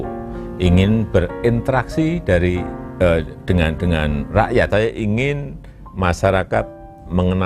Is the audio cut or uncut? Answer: cut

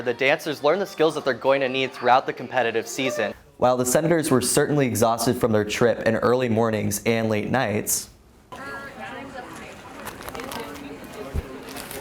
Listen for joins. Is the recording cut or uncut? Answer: cut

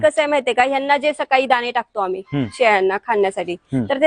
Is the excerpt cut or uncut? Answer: uncut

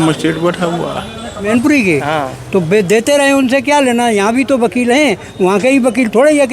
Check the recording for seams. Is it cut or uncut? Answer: cut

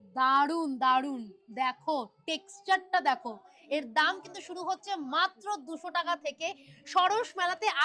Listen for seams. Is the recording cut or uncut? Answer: uncut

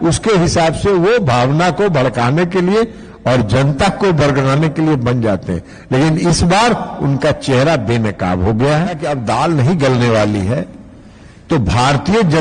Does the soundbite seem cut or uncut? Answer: cut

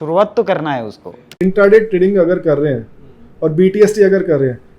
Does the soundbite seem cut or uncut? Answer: cut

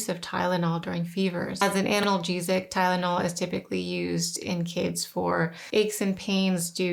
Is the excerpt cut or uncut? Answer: cut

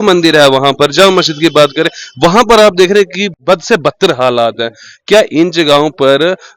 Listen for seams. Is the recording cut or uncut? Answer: cut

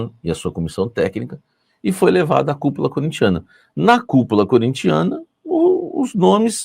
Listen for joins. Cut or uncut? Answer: uncut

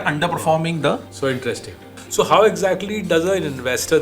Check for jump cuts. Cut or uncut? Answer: cut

